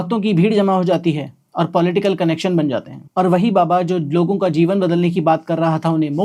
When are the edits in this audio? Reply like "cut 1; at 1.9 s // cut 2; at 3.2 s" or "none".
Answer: cut 1; at 3.0 s